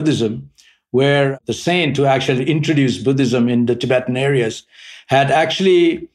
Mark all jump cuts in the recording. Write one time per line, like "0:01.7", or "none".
0:01.3